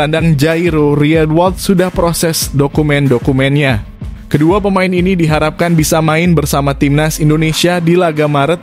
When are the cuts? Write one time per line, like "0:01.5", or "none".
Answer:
none